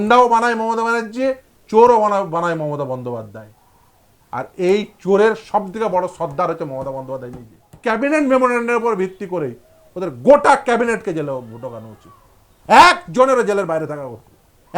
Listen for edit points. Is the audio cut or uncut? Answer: cut